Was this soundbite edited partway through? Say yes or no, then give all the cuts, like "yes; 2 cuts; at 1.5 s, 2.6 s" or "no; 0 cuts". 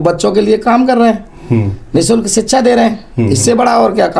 no; 0 cuts